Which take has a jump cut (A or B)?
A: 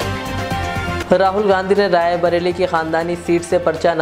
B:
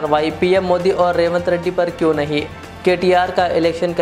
A